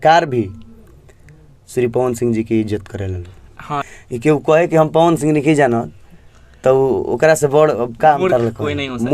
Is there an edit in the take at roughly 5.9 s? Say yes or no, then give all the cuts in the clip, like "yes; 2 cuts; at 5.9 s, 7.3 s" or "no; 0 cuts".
no; 1 cut; at 3.8 s